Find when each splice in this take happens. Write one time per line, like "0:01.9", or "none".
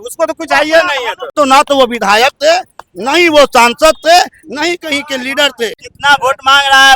0:01.3
0:05.9